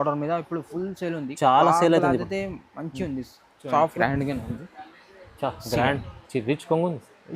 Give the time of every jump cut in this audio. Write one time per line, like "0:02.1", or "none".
0:03.9